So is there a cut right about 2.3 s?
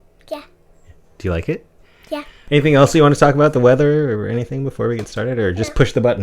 yes; 1 cut; at 2.3 s

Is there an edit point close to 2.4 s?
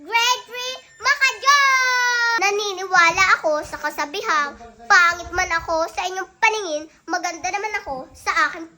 yes; 1 cut; at 2.4 s

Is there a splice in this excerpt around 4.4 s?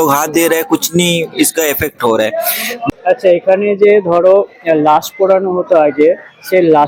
no; 1 cut; at 2.7 s

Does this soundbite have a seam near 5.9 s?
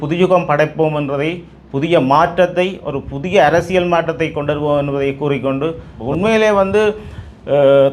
yes; 1 cut; at 5.9 s

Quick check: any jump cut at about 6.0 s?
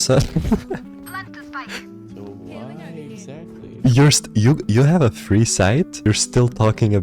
yes; 1 cut; at 6.0 s

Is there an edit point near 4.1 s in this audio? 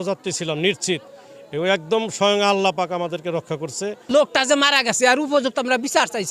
yes; 1 cut; at 4.1 s

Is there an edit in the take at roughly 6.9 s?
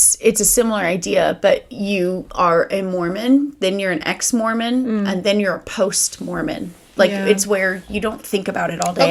no; 0 cuts

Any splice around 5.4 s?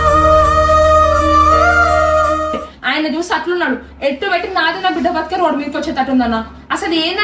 no; 1 cut; at 2.7 s

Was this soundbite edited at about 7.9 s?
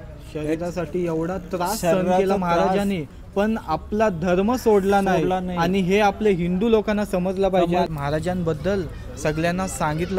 yes; 1 cut; at 7.9 s

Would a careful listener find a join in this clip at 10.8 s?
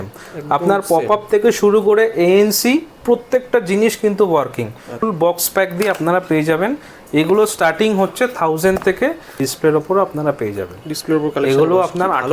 no; 2 cuts; at 5.0 s, 9.4 s

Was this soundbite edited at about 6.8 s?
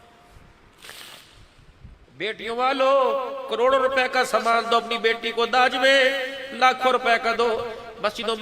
no; 1 cut; at 2.0 s

